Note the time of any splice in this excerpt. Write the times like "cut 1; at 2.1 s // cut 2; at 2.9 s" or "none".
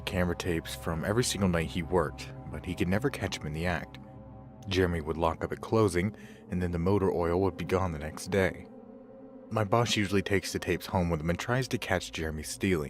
cut 1; at 7.3 s